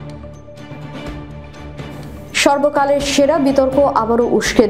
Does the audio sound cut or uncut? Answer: cut